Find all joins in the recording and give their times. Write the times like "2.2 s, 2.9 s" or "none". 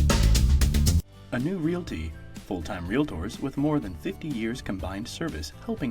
1.0 s